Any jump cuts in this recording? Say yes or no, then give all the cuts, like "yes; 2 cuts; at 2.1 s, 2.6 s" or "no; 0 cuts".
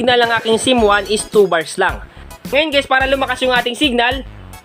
yes; 1 cut; at 2.1 s